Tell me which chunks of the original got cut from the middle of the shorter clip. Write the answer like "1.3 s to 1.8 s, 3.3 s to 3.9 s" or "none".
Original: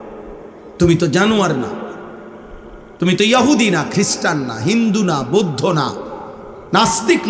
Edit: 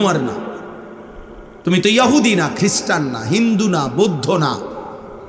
none